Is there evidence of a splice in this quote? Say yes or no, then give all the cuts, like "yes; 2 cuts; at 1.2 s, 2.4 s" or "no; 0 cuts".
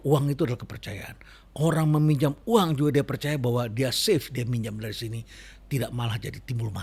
no; 0 cuts